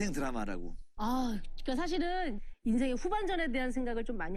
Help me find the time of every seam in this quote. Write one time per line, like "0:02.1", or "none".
none